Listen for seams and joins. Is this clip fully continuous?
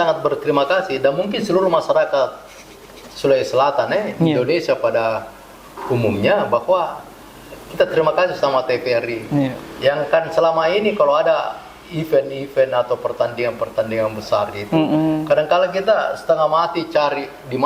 yes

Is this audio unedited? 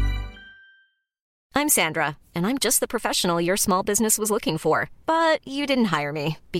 no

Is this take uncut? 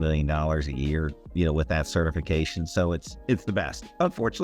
no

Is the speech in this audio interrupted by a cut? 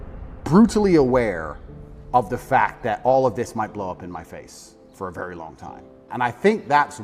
no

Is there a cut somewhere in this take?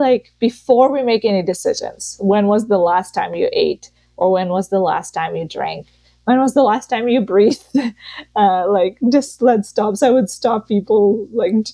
no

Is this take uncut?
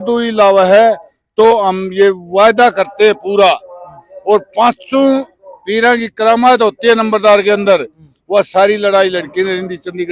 yes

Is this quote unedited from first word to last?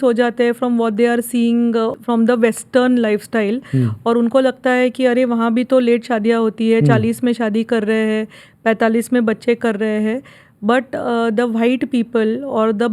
no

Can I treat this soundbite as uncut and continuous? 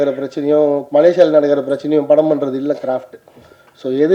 yes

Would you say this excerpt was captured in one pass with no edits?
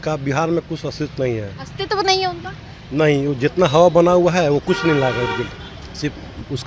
yes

